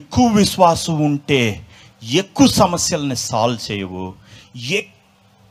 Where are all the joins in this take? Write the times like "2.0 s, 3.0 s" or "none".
none